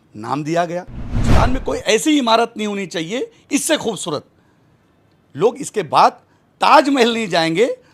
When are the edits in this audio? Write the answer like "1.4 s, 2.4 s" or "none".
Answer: 1.2 s